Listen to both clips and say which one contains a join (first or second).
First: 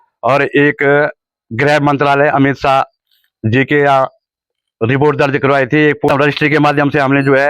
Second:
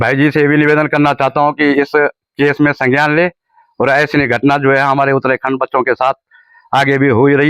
first